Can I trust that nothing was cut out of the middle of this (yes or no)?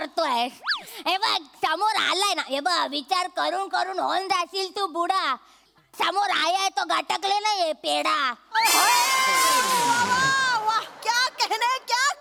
yes